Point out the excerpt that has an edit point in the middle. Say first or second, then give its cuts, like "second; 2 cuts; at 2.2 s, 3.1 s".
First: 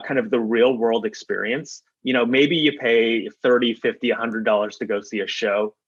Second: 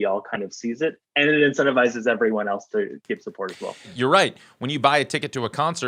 second; 1 cut; at 3.9 s